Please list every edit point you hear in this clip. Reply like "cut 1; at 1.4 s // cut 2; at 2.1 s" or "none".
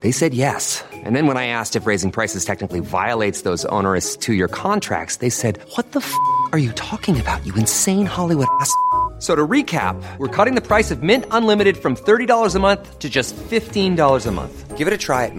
none